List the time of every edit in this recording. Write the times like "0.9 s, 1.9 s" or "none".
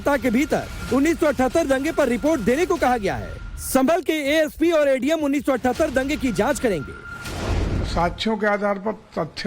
1.9 s